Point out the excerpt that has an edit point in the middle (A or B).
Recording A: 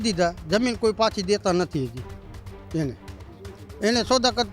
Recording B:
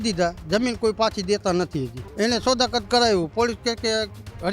B